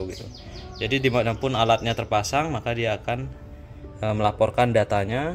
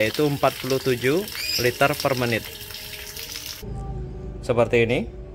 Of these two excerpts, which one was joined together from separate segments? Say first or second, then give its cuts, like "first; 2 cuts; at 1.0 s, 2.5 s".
second; 1 cut; at 3.6 s